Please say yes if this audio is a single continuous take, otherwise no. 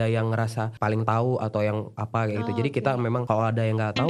yes